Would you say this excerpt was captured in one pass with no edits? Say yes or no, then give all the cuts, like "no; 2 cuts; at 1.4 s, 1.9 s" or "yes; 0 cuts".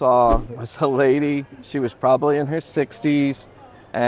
yes; 0 cuts